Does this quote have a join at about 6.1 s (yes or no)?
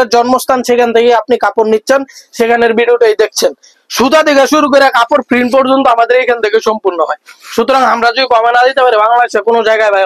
no